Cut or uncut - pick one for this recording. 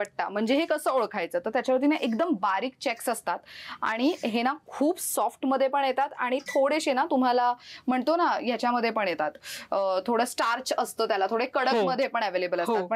uncut